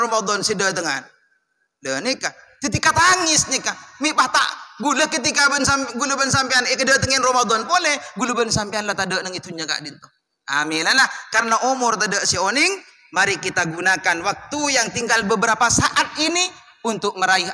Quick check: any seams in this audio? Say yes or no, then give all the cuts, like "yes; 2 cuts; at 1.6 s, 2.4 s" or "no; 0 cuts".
no; 0 cuts